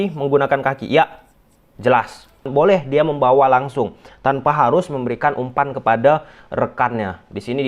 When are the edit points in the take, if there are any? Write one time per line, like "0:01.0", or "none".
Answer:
0:02.5